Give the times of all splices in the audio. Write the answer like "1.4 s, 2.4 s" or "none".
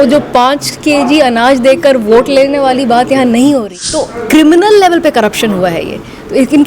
3.8 s